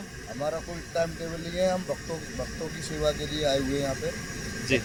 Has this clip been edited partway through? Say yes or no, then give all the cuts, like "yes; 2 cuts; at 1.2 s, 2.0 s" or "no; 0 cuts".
no; 0 cuts